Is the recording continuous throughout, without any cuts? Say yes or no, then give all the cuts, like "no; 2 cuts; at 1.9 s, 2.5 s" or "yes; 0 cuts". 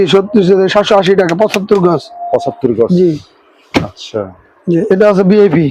yes; 0 cuts